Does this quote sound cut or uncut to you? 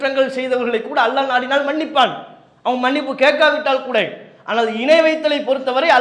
uncut